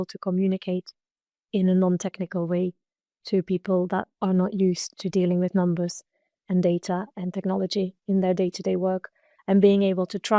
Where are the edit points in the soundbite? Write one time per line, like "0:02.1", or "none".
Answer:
none